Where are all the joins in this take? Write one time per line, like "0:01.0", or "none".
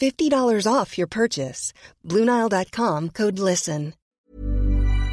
0:04.0